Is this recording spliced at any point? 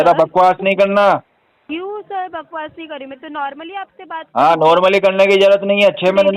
no; 0 cuts

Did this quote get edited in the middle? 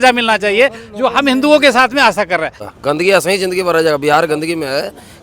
yes; 1 cut; at 2.7 s

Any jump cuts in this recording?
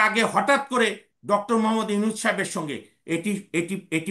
no; 0 cuts

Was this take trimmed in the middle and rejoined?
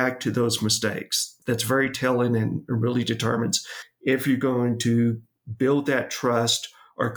yes; 1 cut; at 1.3 s

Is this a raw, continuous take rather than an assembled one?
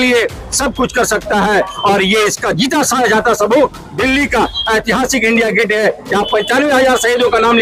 yes; 0 cuts

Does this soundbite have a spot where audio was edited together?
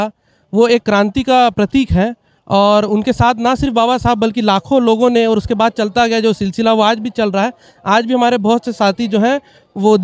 no; 0 cuts

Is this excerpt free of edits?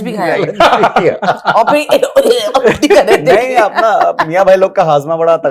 yes; 0 cuts

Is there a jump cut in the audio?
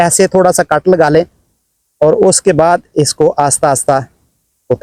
no; 0 cuts

